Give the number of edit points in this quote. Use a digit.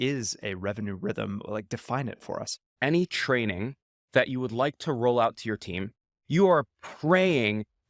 2